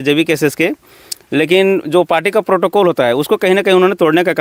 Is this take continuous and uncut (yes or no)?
yes